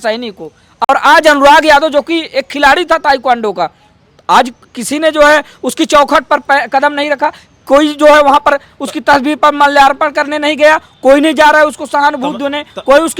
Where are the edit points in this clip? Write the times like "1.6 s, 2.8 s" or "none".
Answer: none